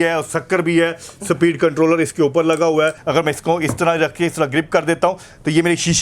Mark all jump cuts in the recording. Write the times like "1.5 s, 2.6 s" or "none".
3.0 s